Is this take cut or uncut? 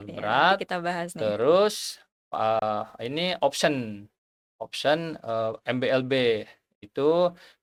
uncut